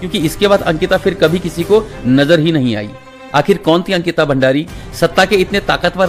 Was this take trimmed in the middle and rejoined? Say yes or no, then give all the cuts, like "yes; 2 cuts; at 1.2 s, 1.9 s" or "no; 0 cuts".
no; 0 cuts